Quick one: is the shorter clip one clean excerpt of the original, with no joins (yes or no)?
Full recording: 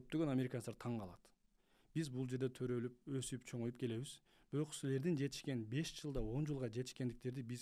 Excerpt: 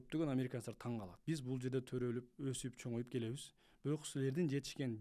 no